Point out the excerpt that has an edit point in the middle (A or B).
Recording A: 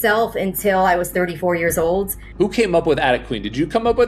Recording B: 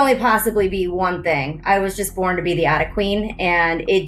A